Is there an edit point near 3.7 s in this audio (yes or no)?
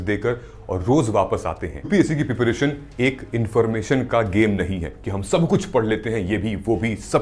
no